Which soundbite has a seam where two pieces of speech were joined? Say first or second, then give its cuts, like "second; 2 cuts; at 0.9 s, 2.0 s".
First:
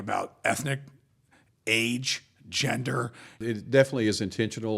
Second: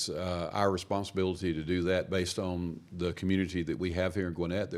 first; 1 cut; at 3.4 s